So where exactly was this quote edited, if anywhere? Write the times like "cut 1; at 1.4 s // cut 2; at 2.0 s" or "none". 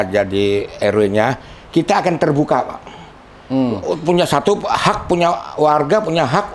none